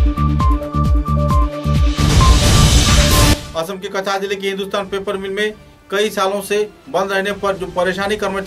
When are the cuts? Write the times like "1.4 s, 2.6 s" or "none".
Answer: none